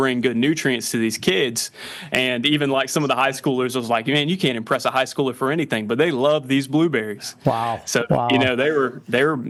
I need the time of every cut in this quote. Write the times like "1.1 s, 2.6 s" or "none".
none

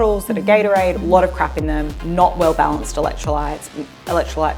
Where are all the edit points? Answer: 1.0 s, 1.9 s

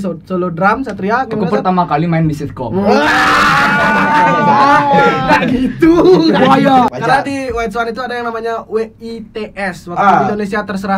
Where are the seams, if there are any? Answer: 6.9 s

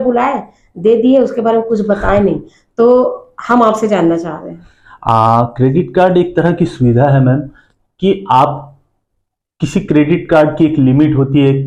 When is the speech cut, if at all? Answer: none

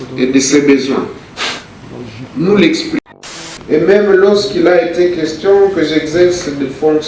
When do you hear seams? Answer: 3.0 s

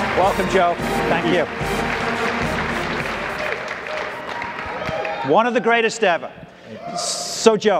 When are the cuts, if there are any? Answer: 2.8 s, 6.9 s

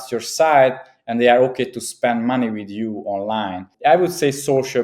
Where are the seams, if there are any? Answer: 3.7 s

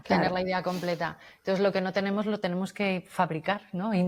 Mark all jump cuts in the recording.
none

